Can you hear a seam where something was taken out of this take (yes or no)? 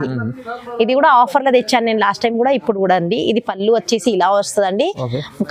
no